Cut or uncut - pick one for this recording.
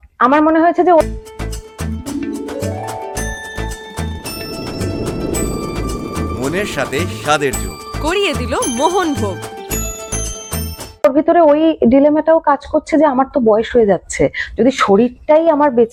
uncut